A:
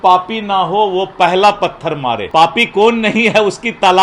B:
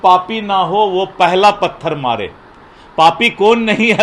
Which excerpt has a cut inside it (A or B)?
A